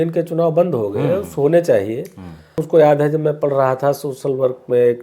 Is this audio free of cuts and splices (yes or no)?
no